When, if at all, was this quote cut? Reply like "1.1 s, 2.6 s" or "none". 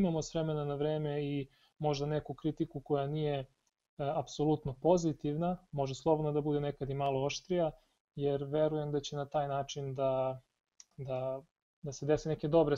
none